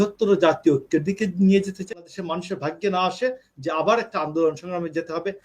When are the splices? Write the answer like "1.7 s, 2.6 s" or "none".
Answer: 1.9 s